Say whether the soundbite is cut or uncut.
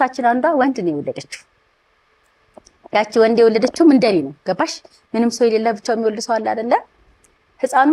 uncut